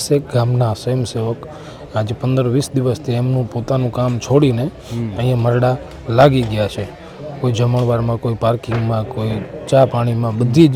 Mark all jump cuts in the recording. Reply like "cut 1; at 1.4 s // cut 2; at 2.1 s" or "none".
none